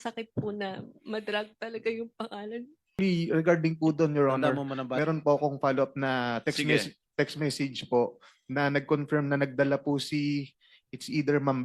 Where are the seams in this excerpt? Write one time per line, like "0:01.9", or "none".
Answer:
0:03.0